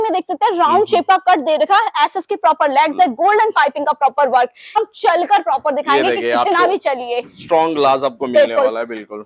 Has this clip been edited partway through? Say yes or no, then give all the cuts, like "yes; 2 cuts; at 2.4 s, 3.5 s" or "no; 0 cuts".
yes; 1 cut; at 4.8 s